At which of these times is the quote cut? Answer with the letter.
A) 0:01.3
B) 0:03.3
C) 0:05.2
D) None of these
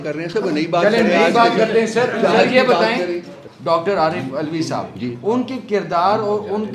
B